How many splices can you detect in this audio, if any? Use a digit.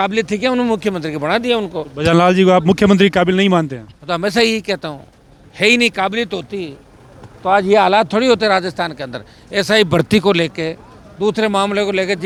0